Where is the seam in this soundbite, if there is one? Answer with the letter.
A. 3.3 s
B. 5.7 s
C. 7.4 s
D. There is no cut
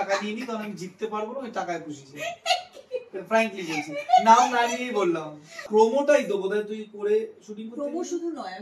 B